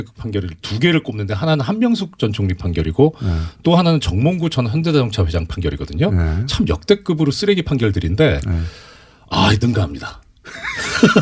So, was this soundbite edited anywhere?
no; 0 cuts

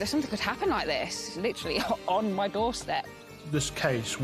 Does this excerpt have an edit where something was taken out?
yes; 2 cuts; at 1.3 s, 3.4 s

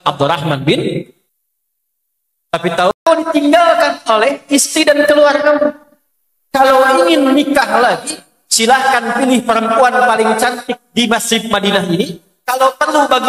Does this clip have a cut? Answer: yes; 1 cut; at 3.0 s

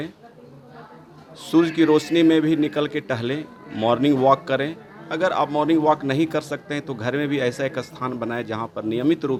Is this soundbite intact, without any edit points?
yes; 0 cuts

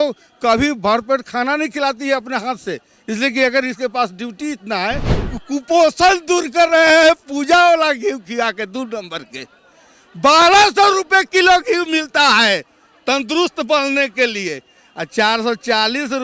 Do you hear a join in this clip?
yes; 1 cut; at 5.1 s

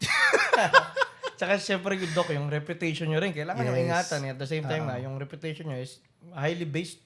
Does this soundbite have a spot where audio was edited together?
no; 0 cuts

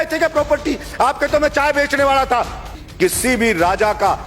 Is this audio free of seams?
no; 1 cut; at 2.8 s

